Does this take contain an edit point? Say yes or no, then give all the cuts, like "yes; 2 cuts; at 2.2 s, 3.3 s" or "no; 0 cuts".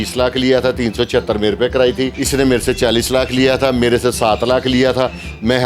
yes; 1 cut; at 2.2 s